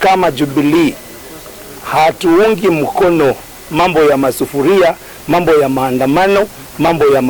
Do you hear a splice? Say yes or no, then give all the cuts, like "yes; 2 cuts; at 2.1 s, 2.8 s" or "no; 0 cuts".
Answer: no; 0 cuts